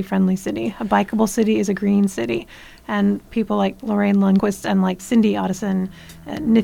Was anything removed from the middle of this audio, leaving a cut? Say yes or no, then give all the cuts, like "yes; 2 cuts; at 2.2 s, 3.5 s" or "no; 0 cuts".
yes; 1 cut; at 4.7 s